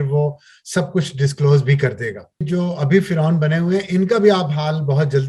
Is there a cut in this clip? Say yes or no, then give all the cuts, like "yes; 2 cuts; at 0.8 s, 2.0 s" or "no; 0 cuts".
yes; 1 cut; at 2.5 s